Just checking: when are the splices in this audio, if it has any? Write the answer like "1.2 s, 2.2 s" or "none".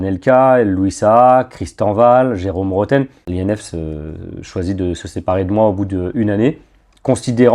3.2 s